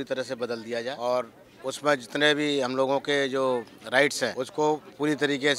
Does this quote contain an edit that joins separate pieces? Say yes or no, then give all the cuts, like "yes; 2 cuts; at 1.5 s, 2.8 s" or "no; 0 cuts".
yes; 2 cuts; at 0.9 s, 4.4 s